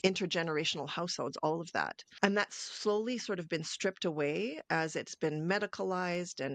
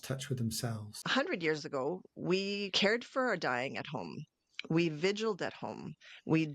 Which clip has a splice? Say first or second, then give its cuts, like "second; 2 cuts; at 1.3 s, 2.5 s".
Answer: second; 2 cuts; at 1.0 s, 2.7 s